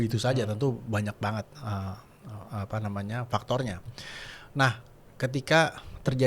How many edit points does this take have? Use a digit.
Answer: 0